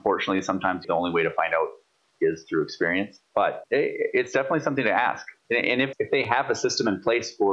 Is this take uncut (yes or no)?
no